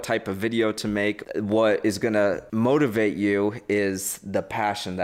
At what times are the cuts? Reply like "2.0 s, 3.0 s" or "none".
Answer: 1.2 s, 2.4 s

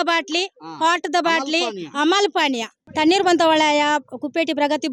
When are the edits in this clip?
2.8 s

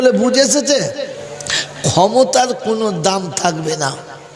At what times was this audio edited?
1.1 s

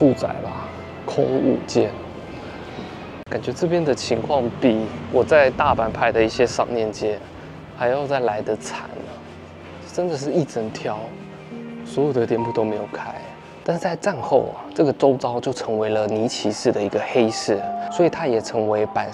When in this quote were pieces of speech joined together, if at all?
3.1 s, 13.5 s

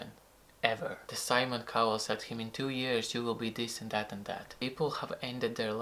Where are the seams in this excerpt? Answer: 1.1 s, 4.5 s

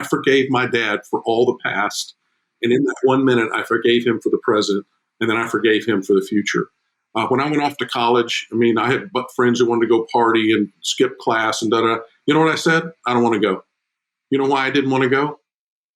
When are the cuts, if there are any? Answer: none

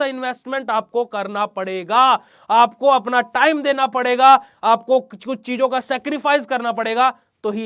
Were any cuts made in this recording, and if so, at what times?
none

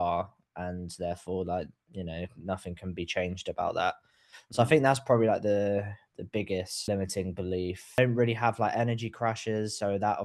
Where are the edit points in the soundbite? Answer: 6.9 s, 8.0 s

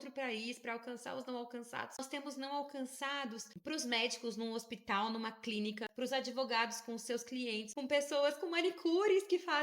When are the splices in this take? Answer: 2.0 s, 3.5 s, 5.9 s, 7.7 s

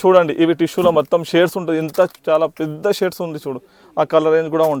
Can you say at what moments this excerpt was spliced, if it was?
none

